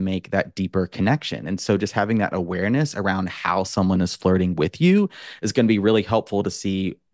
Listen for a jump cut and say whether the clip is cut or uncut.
uncut